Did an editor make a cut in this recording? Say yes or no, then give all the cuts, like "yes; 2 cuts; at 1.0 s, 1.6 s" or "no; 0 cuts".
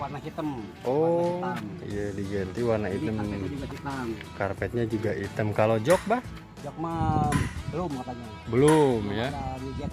no; 0 cuts